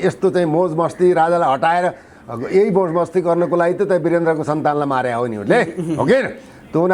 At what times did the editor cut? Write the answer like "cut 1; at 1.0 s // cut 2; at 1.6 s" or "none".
none